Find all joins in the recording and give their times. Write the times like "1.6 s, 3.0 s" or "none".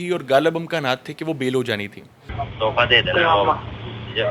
2.2 s

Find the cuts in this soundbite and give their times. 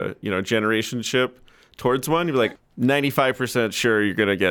2.5 s

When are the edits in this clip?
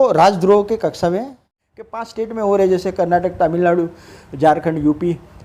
2.1 s

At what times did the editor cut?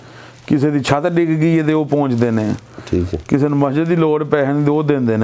none

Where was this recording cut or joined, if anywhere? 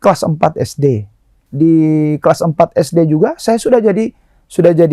1.4 s

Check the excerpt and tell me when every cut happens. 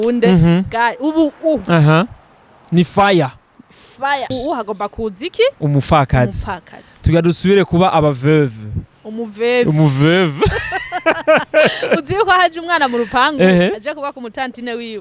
4.3 s

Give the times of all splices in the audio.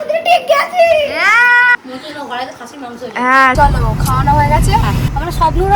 1.8 s, 3.5 s

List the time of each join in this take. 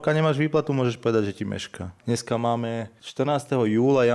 1.9 s, 3.0 s

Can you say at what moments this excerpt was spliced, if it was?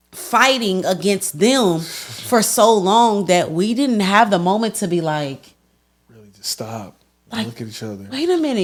none

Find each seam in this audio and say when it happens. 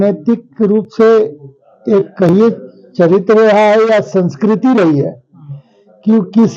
none

